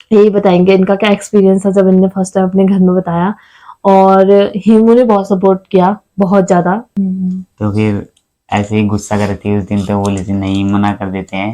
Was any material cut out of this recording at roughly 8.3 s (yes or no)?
no